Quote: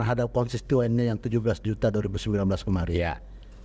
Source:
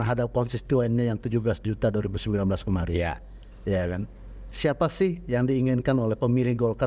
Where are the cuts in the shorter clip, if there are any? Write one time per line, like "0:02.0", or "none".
none